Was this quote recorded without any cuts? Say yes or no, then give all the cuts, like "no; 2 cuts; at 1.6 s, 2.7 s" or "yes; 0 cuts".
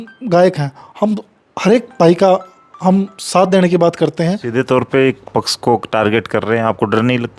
no; 1 cut; at 4.4 s